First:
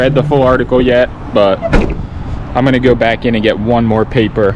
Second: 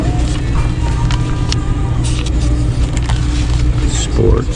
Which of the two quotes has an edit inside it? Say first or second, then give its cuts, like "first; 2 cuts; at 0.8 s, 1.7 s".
second; 1 cut; at 1.5 s